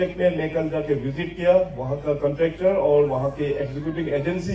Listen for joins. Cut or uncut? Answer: uncut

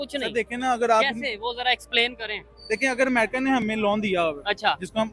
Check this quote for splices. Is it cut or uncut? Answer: uncut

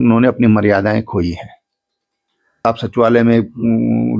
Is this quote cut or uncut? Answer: cut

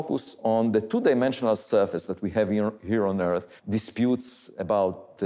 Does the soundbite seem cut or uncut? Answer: cut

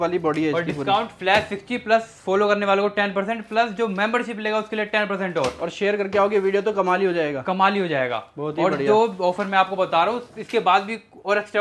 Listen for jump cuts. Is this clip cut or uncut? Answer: uncut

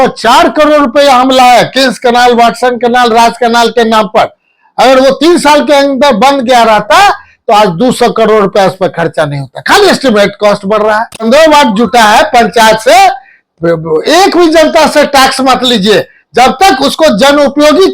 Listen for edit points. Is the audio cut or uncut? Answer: cut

